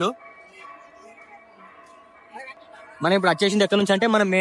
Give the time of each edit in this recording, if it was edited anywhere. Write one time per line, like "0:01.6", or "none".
0:02.6